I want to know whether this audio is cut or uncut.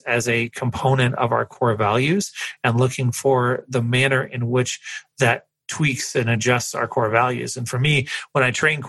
uncut